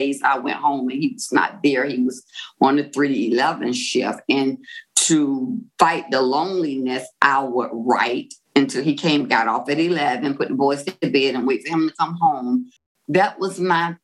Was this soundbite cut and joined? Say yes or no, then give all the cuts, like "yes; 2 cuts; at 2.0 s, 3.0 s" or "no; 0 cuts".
yes; 1 cut; at 12.9 s